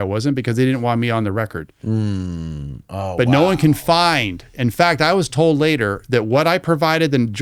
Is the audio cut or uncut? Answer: uncut